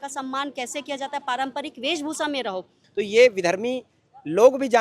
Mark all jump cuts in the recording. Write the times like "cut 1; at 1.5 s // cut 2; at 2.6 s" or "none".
cut 1; at 2.8 s